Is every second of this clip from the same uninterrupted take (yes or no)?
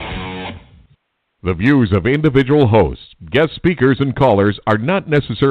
no